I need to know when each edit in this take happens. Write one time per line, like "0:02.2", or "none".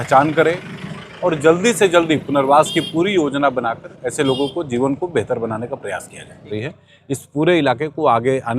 0:06.5